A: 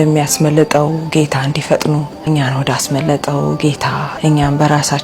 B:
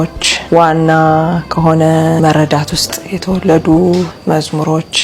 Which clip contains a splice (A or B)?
A